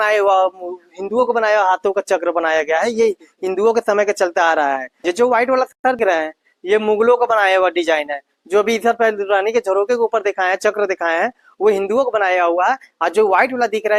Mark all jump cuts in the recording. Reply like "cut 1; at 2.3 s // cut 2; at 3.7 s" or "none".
none